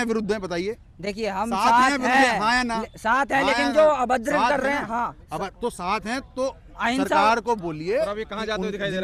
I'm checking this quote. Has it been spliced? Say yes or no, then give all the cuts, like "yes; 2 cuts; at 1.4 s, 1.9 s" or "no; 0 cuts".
no; 0 cuts